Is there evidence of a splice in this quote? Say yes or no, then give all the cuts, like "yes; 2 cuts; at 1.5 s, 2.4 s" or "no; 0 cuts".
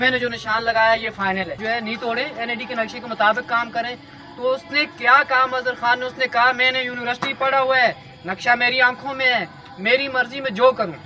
yes; 1 cut; at 1.6 s